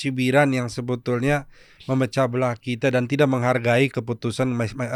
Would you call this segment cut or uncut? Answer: uncut